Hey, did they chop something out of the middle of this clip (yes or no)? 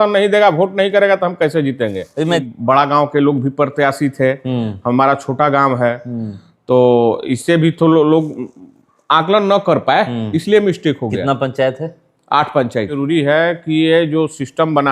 yes